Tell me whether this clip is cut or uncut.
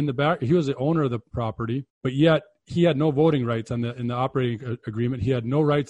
cut